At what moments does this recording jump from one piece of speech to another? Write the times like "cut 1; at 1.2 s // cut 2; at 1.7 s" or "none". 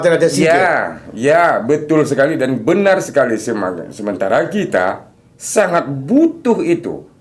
none